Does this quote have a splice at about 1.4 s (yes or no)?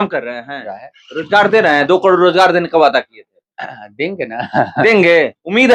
no